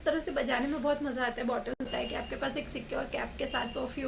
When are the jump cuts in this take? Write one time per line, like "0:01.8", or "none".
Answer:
0:01.9